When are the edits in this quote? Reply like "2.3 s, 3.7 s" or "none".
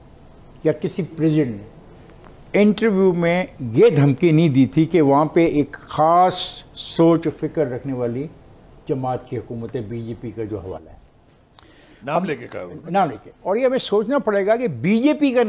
none